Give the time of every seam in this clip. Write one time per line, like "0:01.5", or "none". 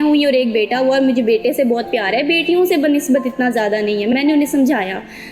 none